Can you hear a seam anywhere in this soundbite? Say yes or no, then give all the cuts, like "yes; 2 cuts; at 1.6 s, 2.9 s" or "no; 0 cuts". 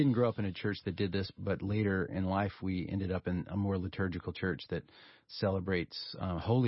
yes; 3 cuts; at 1.3 s, 2.6 s, 5.3 s